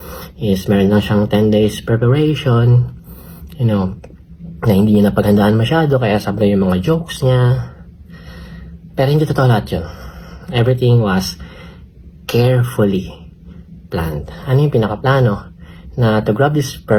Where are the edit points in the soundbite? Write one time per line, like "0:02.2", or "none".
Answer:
none